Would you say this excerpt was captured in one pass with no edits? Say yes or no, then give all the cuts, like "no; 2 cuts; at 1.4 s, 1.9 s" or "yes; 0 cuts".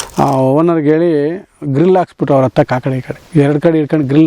no; 1 cut; at 3.1 s